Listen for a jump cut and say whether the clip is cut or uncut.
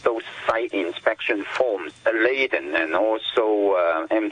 cut